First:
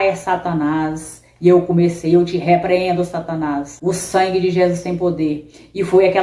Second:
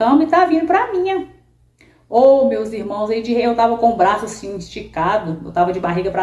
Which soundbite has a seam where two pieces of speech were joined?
first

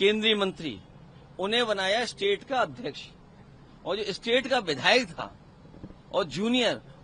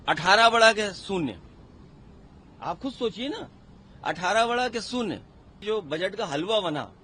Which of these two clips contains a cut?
second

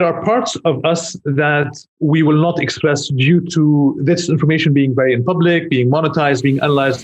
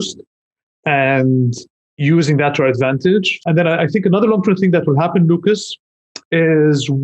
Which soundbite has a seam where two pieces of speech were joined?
second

